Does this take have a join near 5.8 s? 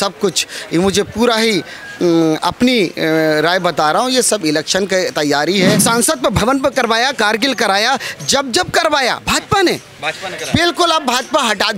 yes; 1 cut; at 5.8 s

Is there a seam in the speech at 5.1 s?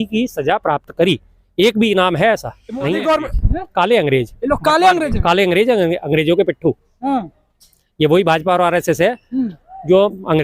no; 1 cut; at 2.9 s

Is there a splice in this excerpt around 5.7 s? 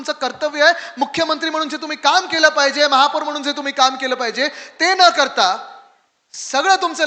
no; 0 cuts

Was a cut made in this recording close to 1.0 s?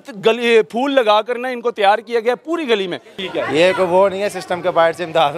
no; 1 cut; at 3.1 s

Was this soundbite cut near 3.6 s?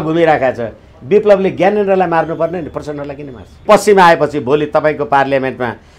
yes; 1 cut; at 3.6 s

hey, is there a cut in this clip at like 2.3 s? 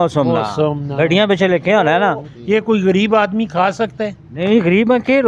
yes; 1 cut; at 2.3 s

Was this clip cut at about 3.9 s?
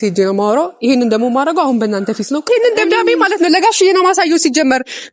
no; 1 cut; at 2.5 s

